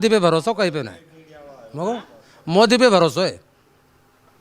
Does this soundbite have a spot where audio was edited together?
no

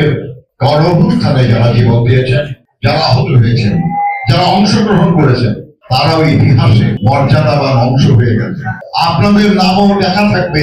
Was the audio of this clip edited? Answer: no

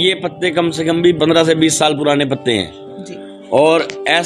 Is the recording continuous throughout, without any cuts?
no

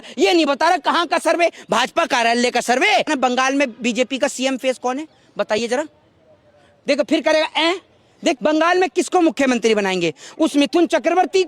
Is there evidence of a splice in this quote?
yes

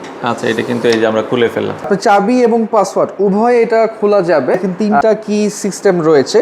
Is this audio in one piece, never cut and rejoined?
no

